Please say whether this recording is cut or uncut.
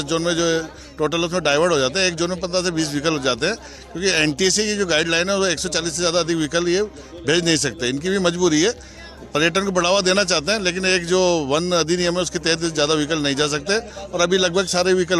uncut